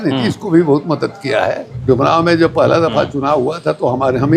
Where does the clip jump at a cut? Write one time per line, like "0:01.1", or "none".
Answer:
0:01.7